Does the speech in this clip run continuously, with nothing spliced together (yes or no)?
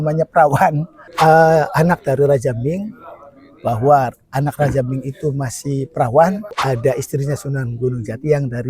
no